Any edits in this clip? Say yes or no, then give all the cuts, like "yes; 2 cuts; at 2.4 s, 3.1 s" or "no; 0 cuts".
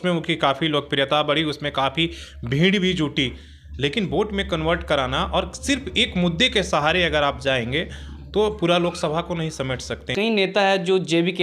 yes; 1 cut; at 10.1 s